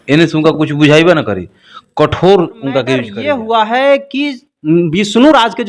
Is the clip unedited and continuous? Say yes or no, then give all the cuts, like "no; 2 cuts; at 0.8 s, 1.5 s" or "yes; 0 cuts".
no; 1 cut; at 3.1 s